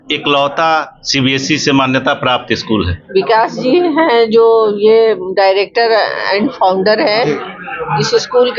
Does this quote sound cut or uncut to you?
cut